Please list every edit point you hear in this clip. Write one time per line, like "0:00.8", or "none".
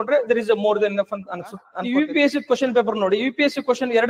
0:01.7